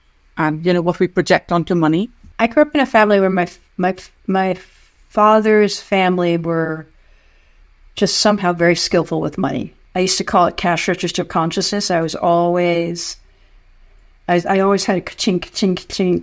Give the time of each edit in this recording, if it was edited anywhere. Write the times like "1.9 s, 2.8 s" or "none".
2.2 s, 9.7 s